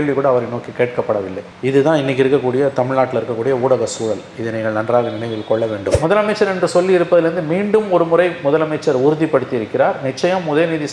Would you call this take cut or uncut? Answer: cut